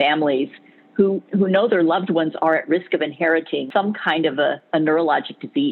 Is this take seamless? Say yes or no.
no